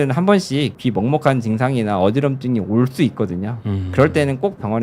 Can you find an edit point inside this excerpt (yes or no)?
no